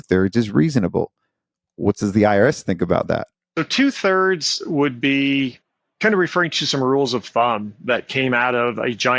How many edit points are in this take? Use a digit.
1